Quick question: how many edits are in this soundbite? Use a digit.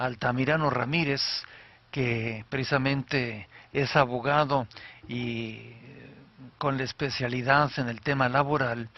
1